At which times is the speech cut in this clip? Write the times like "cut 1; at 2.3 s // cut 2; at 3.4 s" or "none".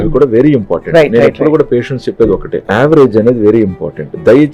cut 1; at 2.6 s